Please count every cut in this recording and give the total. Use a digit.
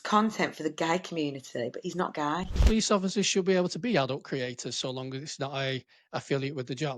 1